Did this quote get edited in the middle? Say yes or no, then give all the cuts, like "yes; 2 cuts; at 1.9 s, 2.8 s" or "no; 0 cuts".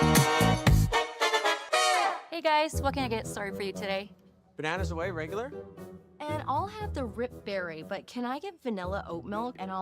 yes; 1 cut; at 2.3 s